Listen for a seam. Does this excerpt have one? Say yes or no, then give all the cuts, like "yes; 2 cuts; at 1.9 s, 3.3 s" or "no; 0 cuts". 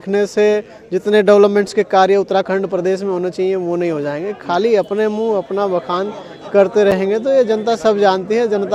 no; 0 cuts